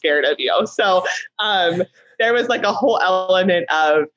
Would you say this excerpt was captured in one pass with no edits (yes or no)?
yes